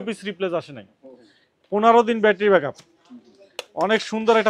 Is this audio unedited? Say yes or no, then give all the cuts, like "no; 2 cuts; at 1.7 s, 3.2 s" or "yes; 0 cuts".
yes; 0 cuts